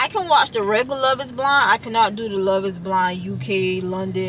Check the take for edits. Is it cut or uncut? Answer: uncut